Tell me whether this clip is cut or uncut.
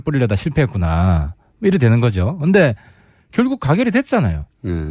uncut